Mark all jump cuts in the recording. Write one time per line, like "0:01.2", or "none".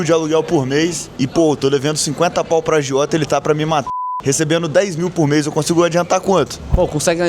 0:01.0
0:03.9